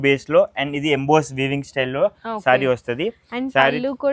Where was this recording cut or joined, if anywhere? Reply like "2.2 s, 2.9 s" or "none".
none